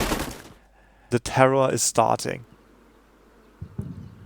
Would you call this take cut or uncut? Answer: cut